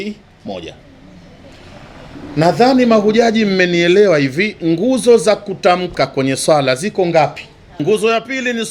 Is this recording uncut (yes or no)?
no